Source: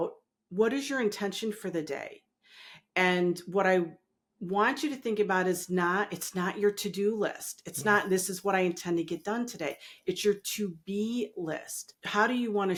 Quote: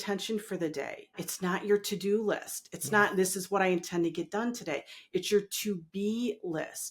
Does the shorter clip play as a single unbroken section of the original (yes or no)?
no